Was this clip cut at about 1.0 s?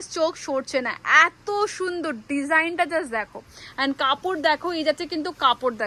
no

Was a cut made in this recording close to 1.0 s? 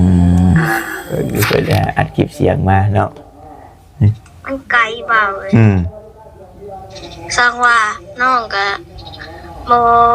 yes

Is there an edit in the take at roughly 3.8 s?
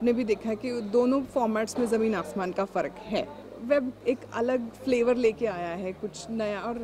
yes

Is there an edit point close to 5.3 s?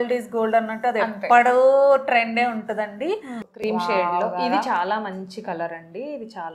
no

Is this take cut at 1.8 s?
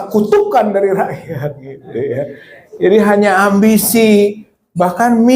yes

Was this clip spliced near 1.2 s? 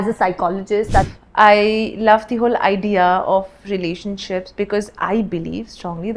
yes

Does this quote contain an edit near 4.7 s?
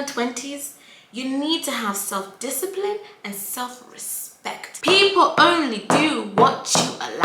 yes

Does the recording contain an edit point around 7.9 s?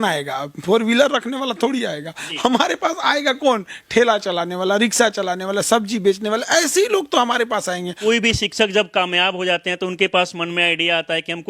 yes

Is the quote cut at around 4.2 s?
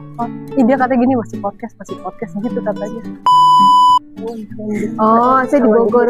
yes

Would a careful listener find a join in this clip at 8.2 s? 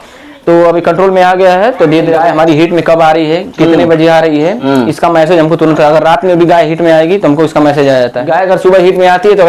yes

